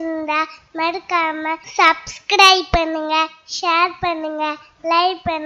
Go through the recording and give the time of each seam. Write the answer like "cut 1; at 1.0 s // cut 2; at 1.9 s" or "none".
cut 1; at 1.6 s